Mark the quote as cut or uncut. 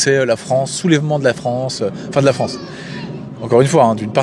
uncut